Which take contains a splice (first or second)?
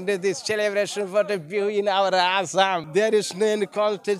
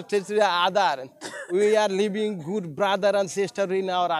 first